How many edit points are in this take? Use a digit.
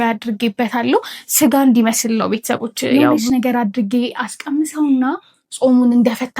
1